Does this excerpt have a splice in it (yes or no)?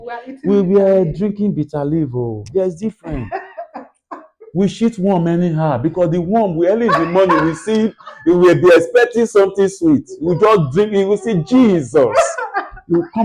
no